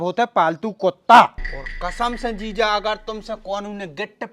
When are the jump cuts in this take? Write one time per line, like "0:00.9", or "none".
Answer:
0:01.4